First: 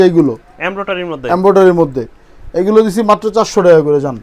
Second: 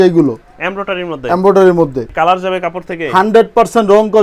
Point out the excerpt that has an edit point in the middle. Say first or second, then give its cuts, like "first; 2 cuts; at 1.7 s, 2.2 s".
second; 1 cut; at 2.1 s